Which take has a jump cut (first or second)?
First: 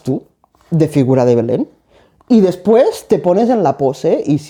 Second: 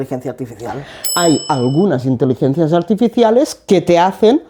second